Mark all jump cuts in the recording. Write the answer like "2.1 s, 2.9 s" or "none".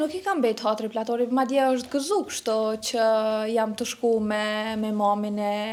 none